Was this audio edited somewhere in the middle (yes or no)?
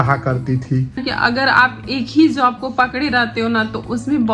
yes